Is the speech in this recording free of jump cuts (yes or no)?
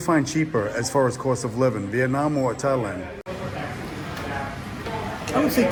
yes